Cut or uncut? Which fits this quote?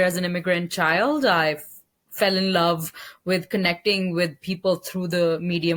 uncut